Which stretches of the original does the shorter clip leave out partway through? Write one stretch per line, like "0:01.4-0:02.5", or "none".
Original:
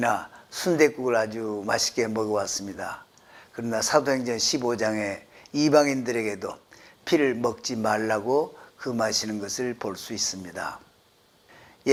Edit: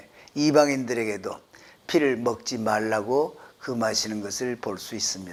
none